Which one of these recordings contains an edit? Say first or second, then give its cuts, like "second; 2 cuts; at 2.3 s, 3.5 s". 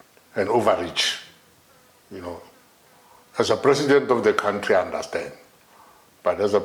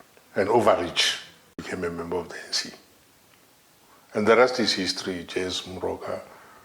second; 1 cut; at 1.6 s